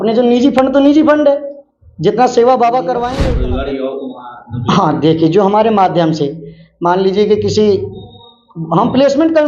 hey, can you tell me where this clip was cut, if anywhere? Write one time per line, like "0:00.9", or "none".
0:03.2